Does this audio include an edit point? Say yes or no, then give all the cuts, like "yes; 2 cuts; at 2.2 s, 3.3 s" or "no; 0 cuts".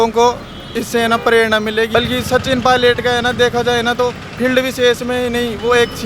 yes; 1 cut; at 1.9 s